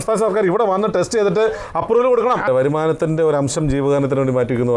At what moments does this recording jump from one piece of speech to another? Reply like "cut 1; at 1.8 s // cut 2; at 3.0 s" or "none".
cut 1; at 2.5 s